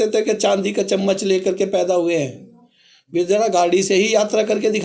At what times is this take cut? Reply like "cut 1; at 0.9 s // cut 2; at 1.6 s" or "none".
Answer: none